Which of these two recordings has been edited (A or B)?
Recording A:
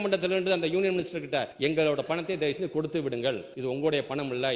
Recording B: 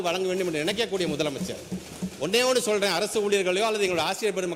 A